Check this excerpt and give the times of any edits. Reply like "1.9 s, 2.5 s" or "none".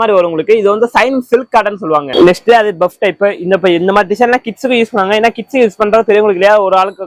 2.1 s